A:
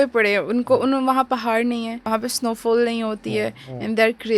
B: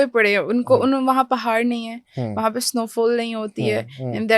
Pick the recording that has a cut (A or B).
A